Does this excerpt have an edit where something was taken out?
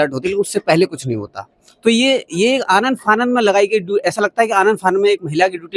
no; 0 cuts

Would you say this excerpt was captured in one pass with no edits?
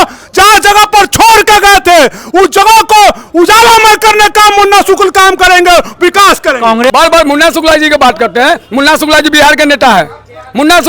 no; 1 cut; at 6.9 s

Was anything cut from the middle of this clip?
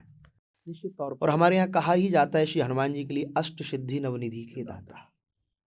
yes; 1 cut; at 1.2 s

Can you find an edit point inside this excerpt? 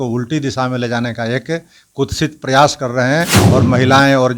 yes; 1 cut; at 3.4 s

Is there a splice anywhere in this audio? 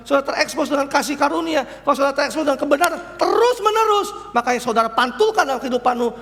no; 0 cuts

